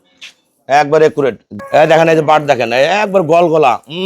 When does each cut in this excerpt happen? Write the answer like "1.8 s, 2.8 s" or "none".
1.5 s